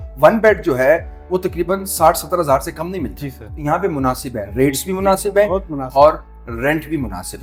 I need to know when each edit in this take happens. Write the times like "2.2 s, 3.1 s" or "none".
none